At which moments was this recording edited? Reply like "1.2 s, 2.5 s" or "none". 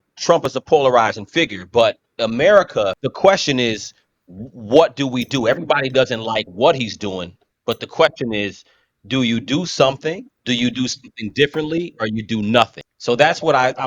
3.0 s, 10.3 s, 12.9 s